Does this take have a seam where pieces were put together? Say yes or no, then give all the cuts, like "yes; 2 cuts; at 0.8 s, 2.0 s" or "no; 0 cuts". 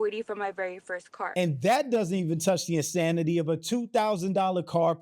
no; 0 cuts